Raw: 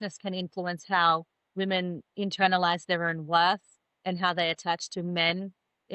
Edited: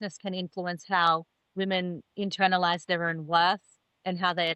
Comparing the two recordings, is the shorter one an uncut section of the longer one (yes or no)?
yes